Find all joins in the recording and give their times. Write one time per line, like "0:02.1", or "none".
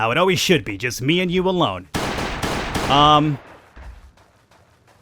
0:02.2